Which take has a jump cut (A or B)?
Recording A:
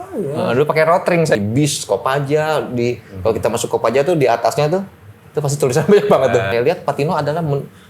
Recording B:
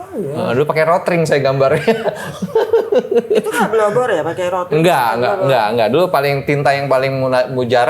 A